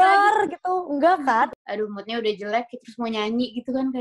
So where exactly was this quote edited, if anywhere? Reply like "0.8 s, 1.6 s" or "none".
1.5 s